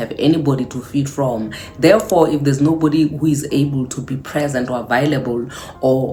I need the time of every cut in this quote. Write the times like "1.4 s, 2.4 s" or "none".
none